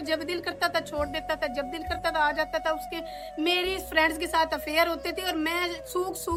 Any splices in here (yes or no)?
no